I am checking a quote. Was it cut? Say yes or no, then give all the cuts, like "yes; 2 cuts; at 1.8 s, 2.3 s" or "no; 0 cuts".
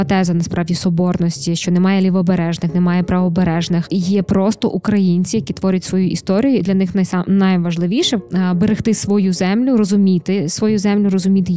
yes; 2 cuts; at 3.9 s, 8.2 s